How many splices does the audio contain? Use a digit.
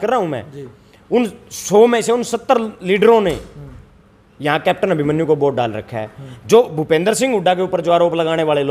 0